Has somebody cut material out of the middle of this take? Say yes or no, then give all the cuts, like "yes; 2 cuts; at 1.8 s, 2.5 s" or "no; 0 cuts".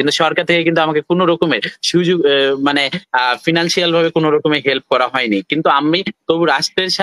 no; 0 cuts